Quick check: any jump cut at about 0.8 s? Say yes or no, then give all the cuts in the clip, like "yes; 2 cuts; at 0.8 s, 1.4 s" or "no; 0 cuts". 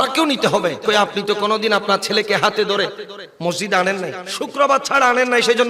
yes; 2 cuts; at 0.8 s, 4.2 s